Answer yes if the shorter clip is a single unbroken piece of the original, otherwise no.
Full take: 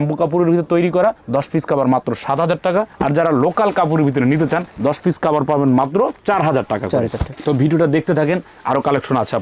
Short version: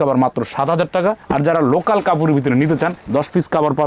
yes